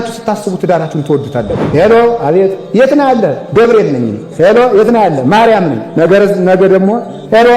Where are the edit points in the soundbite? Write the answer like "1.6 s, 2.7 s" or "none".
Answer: 1.6 s, 5.8 s